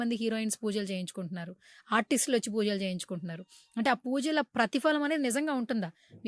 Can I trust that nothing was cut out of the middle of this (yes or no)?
yes